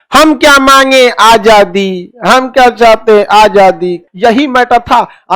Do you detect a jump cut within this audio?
yes; 1 cut; at 4.0 s

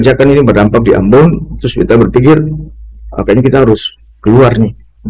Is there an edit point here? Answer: no; 0 cuts

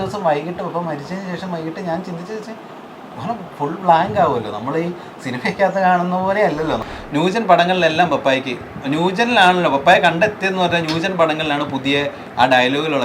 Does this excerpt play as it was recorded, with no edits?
no; 1 cut; at 6.9 s

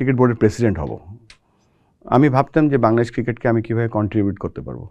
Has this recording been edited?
no; 0 cuts

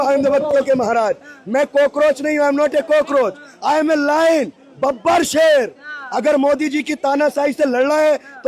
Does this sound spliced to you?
no; 0 cuts

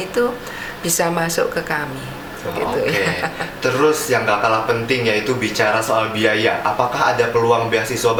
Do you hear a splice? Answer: no; 0 cuts

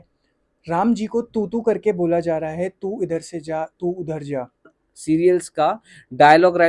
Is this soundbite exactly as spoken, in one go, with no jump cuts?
no; 1 cut; at 4.8 s

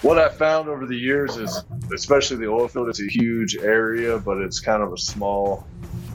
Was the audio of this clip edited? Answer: no; 0 cuts

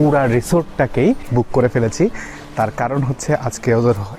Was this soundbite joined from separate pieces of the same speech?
yes; 1 cut; at 1.2 s

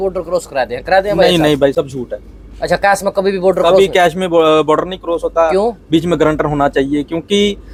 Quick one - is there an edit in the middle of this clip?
no; 0 cuts

